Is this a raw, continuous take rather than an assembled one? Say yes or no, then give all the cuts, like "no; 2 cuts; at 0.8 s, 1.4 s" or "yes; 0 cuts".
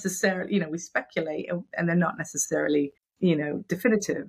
no; 1 cut; at 3.0 s